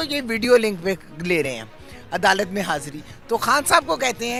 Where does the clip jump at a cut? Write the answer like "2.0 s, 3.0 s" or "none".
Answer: none